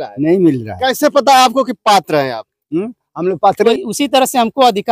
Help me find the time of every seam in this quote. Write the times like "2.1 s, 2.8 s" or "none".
3.7 s